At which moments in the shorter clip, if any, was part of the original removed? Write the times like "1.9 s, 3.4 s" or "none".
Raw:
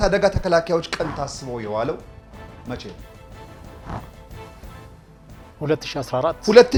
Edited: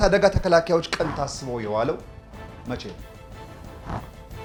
none